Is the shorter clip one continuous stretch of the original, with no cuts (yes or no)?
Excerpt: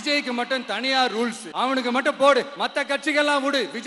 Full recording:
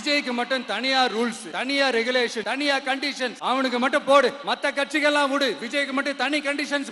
no